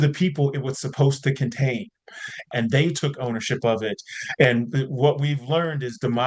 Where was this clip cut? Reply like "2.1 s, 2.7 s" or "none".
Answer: 2.5 s